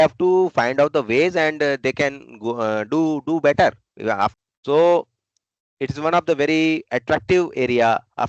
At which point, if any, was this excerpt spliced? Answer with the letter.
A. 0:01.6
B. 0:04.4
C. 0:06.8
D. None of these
B